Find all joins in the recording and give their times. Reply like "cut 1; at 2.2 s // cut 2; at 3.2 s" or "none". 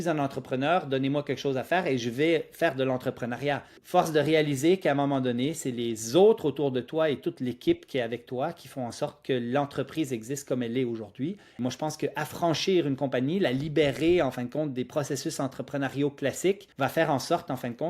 cut 1; at 3.7 s // cut 2; at 11.6 s // cut 3; at 16.7 s